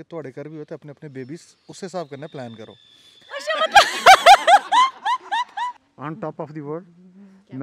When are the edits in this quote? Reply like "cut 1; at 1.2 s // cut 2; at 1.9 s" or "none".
cut 1; at 5.8 s